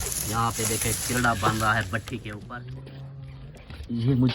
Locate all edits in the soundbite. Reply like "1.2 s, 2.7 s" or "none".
2.3 s